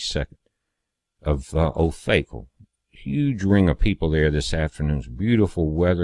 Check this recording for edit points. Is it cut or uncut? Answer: uncut